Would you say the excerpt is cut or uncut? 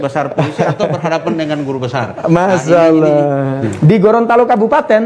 cut